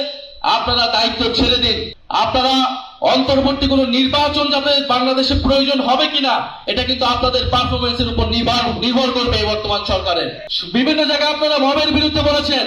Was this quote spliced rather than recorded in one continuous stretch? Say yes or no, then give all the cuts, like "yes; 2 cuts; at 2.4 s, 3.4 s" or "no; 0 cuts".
no; 0 cuts